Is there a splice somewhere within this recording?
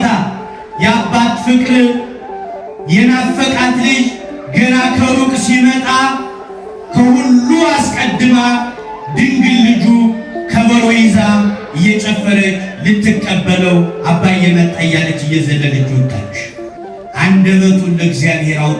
yes; 1 cut; at 17.0 s

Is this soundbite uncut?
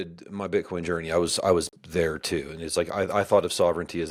yes; 0 cuts

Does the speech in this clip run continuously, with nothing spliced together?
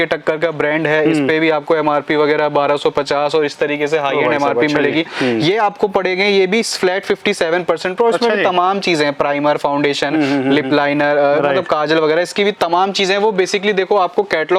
yes; 0 cuts

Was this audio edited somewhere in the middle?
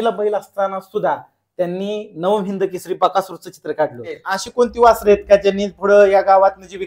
yes; 1 cut; at 4.4 s

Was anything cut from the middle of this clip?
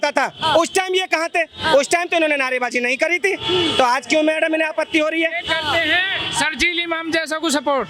no; 0 cuts

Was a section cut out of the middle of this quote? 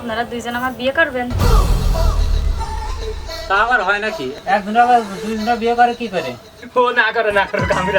yes; 1 cut; at 6.5 s

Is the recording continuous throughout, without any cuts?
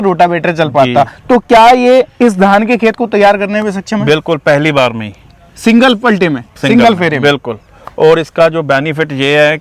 yes; 0 cuts

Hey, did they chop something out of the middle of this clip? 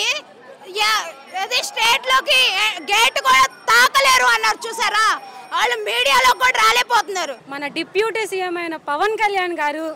yes; 1 cut; at 7.4 s

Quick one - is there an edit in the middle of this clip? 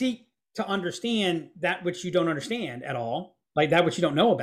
no; 0 cuts

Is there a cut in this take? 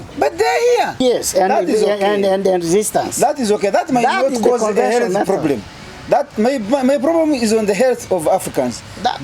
yes; 1 cut; at 1.0 s

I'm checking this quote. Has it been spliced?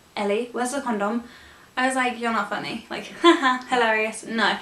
no; 0 cuts

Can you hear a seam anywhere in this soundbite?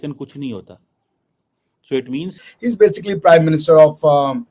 yes; 1 cut; at 2.4 s

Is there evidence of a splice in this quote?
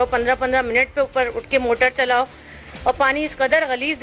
no; 0 cuts

